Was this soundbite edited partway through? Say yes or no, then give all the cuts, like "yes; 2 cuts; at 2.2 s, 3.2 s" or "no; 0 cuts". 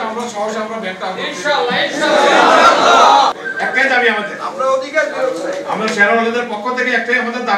yes; 1 cut; at 3.4 s